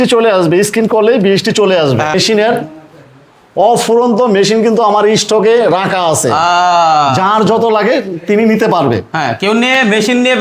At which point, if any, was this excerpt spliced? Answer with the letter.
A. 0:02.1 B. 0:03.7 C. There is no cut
A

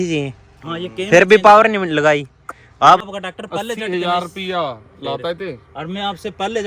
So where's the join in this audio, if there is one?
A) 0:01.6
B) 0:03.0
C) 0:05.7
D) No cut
B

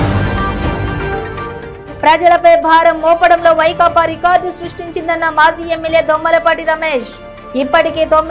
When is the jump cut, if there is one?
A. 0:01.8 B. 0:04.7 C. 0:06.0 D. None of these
A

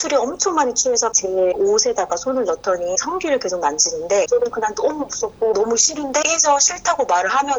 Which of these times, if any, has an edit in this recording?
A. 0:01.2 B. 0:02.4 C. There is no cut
A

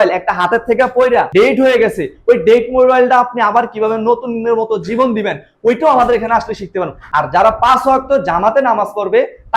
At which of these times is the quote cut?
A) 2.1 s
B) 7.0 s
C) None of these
B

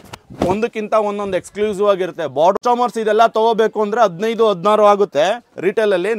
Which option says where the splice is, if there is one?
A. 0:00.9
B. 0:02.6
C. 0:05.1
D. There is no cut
B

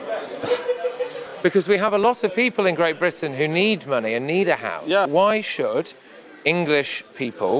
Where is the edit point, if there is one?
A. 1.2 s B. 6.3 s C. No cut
C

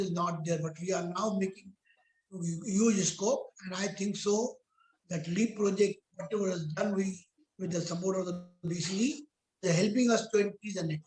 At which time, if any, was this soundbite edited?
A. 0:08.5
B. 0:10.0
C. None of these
A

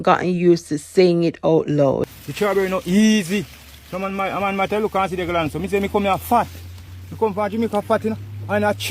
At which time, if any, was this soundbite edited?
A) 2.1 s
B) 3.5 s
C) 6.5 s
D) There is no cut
A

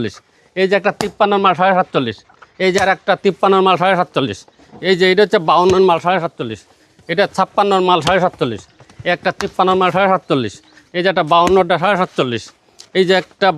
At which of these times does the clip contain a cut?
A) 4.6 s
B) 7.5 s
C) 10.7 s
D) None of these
D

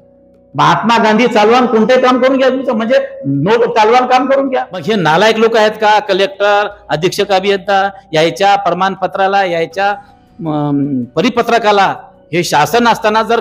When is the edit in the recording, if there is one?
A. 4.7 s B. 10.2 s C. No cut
A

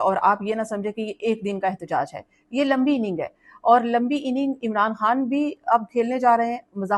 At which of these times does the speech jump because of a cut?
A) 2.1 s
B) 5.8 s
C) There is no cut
C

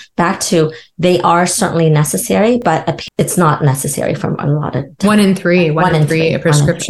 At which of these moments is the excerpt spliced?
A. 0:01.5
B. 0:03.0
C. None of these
B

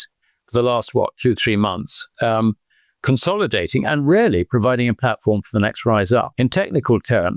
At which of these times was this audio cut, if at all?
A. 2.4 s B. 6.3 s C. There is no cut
C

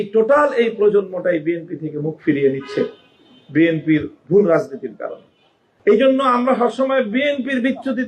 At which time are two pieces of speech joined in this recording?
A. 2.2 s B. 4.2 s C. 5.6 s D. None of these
C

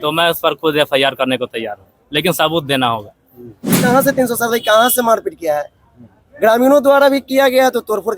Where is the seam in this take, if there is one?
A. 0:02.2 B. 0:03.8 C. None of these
B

